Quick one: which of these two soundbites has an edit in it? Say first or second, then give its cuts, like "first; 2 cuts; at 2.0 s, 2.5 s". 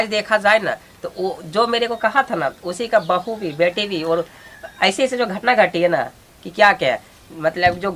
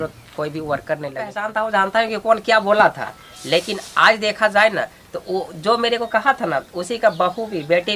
second; 1 cut; at 1.4 s